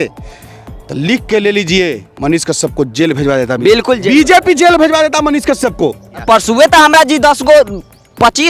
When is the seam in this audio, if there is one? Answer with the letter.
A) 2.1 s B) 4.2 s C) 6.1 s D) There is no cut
C